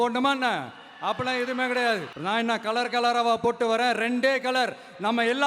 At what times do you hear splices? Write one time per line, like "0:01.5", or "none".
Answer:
0:02.1